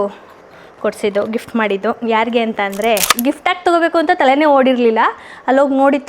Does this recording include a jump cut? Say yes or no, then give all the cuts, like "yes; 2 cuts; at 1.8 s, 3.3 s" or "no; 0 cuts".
yes; 1 cut; at 3.1 s